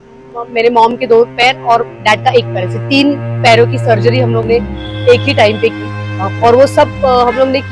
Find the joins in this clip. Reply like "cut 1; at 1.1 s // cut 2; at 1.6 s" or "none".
none